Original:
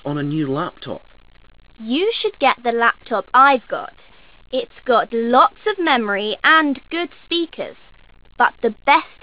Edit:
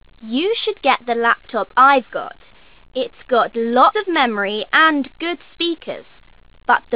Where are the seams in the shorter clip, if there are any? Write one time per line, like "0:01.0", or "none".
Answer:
0:03.9